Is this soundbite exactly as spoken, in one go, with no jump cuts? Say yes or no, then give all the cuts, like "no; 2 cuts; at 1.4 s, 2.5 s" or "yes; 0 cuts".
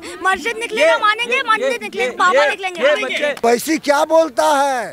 no; 1 cut; at 3.4 s